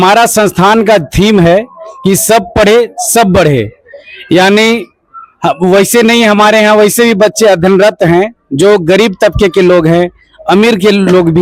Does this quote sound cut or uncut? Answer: uncut